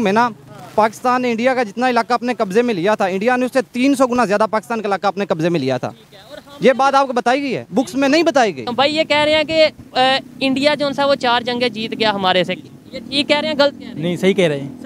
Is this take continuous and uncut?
no; 1 cut; at 8.6 s

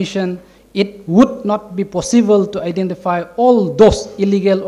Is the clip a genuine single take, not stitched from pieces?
yes; 0 cuts

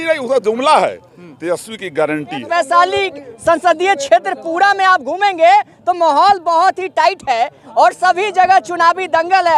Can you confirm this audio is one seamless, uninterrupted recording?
no; 1 cut; at 2.5 s

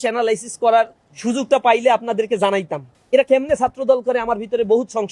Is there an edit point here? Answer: no; 0 cuts

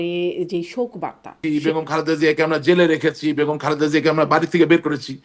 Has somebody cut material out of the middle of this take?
yes; 1 cut; at 1.4 s

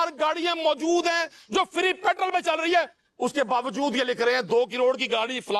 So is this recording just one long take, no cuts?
yes; 0 cuts

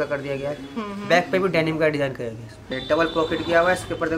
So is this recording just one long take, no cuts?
no; 1 cut; at 2.7 s

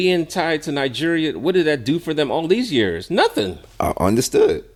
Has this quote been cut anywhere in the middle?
no; 0 cuts

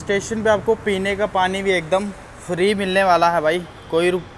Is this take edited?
no; 0 cuts

